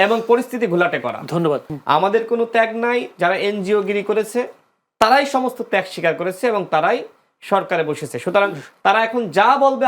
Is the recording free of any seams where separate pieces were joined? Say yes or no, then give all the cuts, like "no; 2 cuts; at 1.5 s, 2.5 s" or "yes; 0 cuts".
no; 1 cut; at 1.6 s